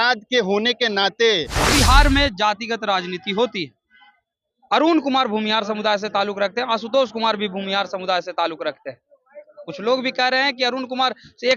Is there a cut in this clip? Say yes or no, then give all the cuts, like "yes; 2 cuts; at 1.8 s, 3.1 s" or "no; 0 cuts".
yes; 1 cut; at 1.6 s